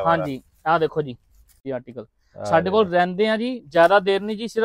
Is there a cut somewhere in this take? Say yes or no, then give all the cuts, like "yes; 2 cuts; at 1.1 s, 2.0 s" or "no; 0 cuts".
yes; 1 cut; at 1.6 s